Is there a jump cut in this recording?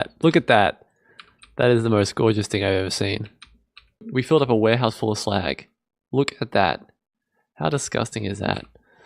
yes; 1 cut; at 4.1 s

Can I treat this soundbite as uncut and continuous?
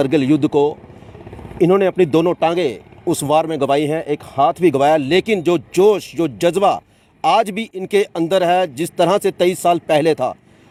yes; 0 cuts

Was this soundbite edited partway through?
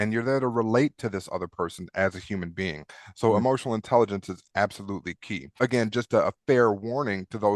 yes; 1 cut; at 5.5 s

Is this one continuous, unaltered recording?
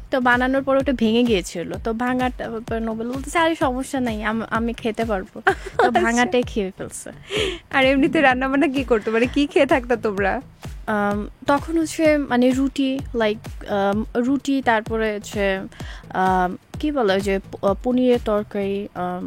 yes; 0 cuts

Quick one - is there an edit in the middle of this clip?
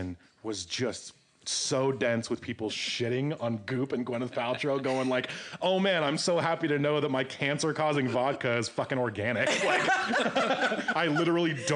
no; 0 cuts

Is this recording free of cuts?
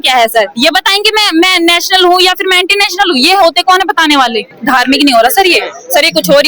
no; 1 cut; at 4.6 s

